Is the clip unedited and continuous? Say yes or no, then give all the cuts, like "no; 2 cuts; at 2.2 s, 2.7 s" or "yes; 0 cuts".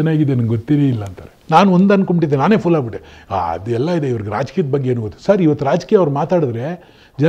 no; 1 cut; at 1.4 s